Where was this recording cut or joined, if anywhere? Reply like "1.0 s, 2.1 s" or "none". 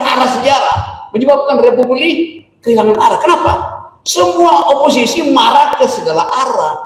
none